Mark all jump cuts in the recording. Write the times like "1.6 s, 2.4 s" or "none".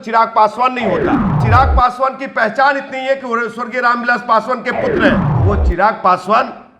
1.4 s, 5.3 s